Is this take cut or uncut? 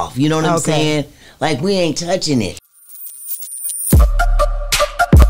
cut